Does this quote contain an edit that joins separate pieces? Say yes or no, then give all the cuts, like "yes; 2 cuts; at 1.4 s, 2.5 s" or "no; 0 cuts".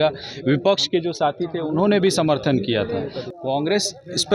yes; 1 cut; at 3.2 s